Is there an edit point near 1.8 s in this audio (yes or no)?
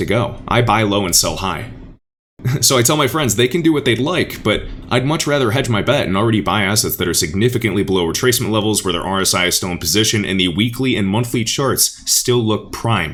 no